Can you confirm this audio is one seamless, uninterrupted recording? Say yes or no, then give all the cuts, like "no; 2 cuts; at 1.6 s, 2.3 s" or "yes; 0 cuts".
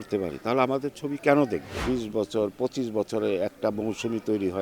no; 1 cut; at 1.8 s